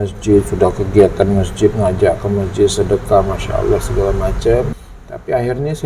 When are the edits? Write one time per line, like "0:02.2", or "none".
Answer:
0:04.8